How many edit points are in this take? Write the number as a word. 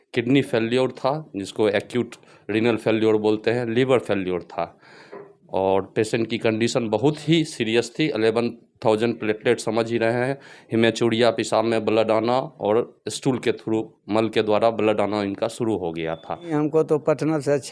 one